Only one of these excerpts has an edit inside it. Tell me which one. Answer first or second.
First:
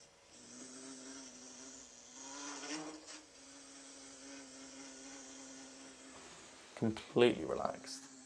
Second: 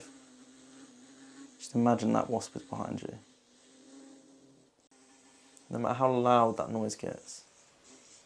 second